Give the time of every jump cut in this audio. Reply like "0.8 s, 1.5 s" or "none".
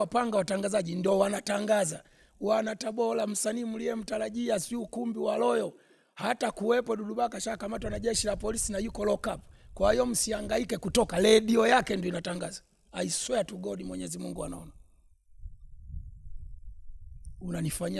none